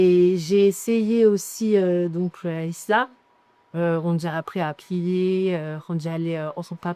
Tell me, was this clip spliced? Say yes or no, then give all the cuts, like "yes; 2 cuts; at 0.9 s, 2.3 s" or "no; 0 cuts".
no; 0 cuts